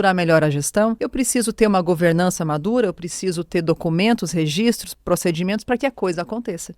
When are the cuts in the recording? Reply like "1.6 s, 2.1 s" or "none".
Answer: 1.0 s